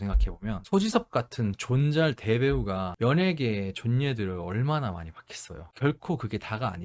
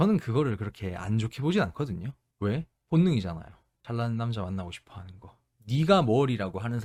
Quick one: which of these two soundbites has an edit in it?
first; 1 cut; at 5.7 s

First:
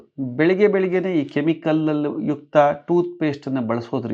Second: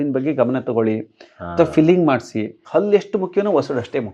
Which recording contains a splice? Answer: second; 1 cut; at 2.6 s

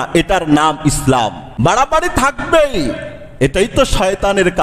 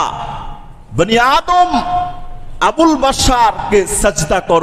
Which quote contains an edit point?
first; 1 cut; at 1.4 s

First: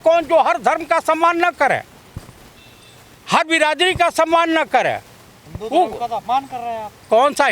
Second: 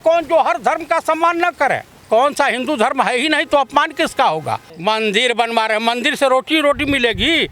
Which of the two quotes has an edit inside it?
second; 2 cuts; at 1.9 s, 4.7 s

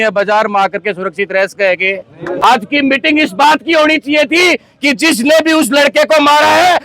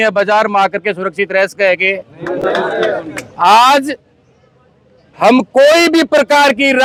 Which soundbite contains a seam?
first; 1 cut; at 2.4 s

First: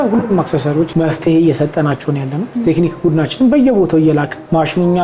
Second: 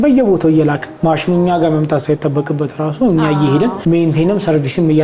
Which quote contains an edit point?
first; 2 cuts; at 0.9 s, 2.4 s

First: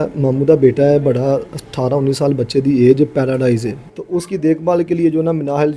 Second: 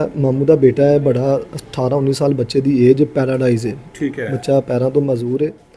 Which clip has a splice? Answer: first; 1 cut; at 3.8 s

